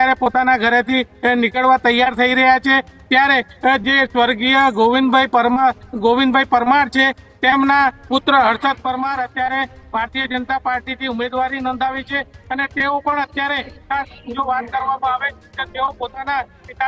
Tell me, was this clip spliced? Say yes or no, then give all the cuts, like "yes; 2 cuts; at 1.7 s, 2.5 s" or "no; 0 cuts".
no; 0 cuts